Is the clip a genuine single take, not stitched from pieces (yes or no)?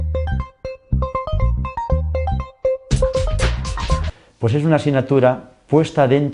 no